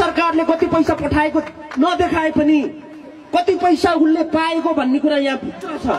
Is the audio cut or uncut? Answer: uncut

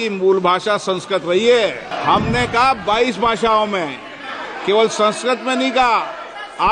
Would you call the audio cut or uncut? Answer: cut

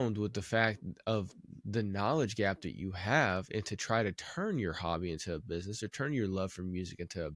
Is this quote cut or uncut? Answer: uncut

